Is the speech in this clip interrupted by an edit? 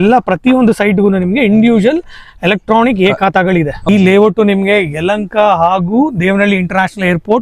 yes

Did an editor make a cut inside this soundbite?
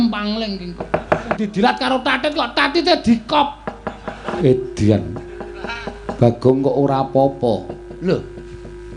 yes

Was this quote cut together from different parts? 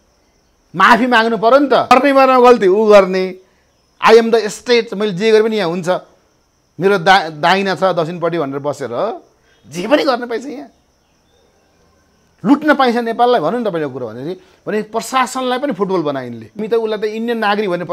yes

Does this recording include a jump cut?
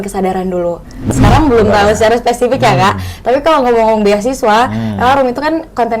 yes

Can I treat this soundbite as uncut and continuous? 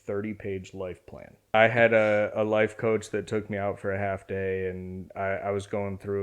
no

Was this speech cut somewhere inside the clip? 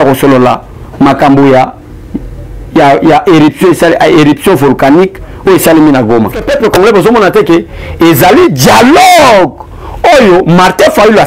yes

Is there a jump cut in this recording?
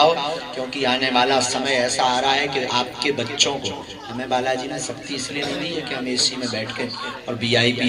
no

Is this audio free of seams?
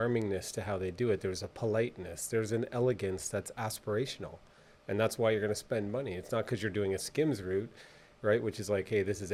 yes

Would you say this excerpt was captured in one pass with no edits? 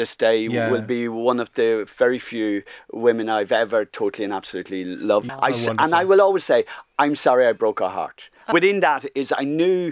no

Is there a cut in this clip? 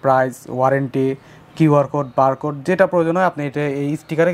no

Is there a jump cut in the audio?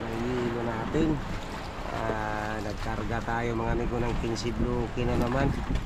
no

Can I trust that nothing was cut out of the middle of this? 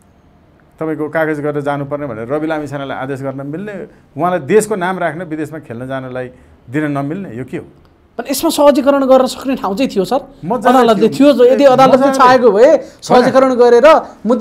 yes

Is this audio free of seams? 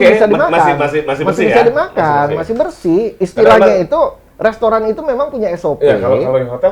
yes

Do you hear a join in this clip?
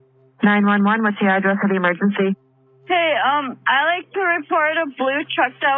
no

